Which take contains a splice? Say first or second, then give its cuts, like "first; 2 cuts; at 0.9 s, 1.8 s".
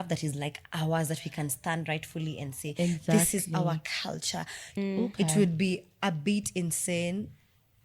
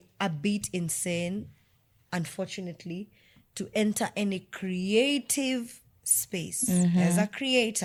first; 1 cut; at 4.8 s